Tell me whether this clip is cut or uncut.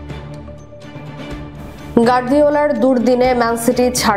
cut